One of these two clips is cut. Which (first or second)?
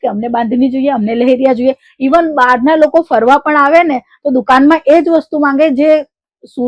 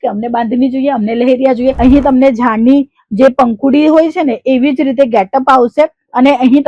second